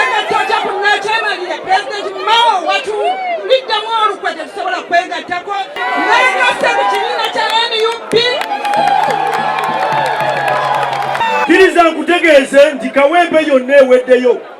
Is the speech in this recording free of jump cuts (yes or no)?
no